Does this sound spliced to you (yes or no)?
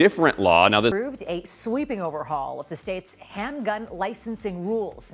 yes